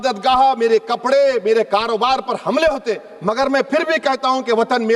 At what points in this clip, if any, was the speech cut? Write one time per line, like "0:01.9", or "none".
none